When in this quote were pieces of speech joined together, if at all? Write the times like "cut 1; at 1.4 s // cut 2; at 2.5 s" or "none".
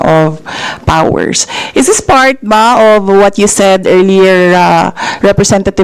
none